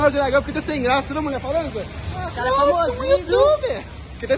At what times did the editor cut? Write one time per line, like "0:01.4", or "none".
none